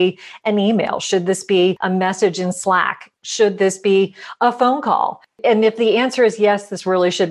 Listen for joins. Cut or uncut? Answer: uncut